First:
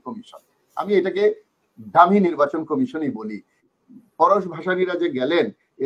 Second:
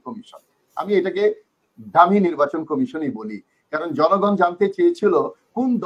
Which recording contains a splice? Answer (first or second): first